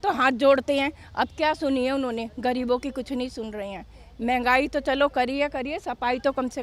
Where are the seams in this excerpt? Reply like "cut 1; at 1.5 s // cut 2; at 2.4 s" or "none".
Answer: none